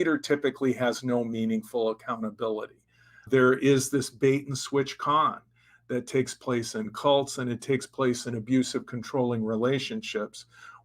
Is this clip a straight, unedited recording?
no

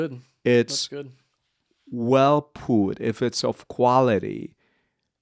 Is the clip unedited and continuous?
yes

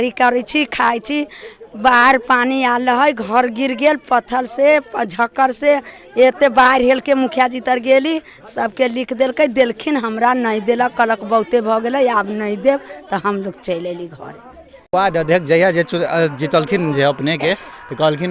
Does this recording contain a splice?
yes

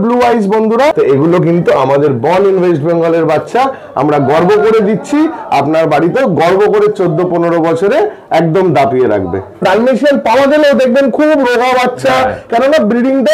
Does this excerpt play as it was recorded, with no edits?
no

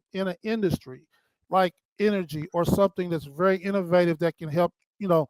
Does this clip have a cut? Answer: no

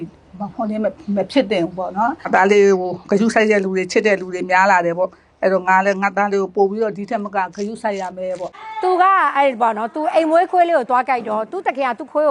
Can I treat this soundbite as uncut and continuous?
no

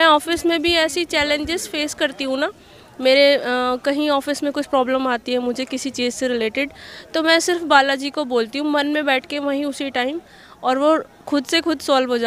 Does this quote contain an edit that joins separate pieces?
no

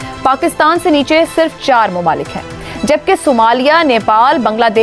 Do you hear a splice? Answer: no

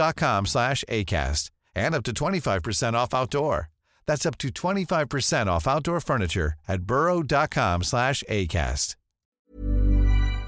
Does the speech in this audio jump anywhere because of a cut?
yes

